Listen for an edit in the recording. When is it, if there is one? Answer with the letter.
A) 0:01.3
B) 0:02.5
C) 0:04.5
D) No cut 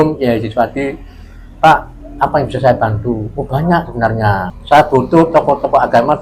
C